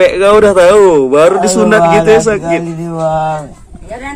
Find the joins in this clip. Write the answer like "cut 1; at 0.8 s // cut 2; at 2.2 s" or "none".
none